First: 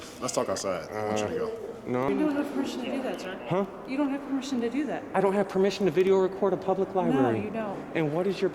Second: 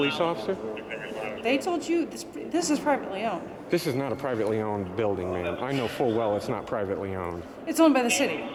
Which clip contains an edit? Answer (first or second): first